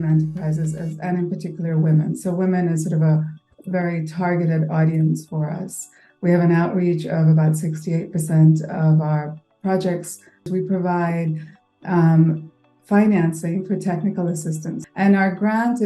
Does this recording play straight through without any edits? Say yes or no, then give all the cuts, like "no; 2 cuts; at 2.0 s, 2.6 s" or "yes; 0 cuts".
no; 2 cuts; at 10.5 s, 14.8 s